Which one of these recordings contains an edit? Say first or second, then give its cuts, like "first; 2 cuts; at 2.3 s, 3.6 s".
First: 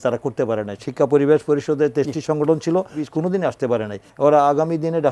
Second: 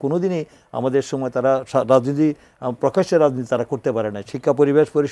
first; 2 cuts; at 3.0 s, 4.1 s